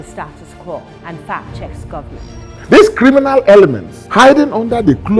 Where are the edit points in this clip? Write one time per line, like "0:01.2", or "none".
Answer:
none